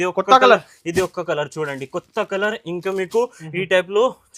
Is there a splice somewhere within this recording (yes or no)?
no